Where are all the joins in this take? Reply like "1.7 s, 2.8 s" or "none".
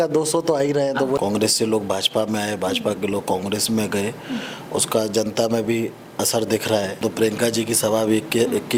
1.2 s, 7.0 s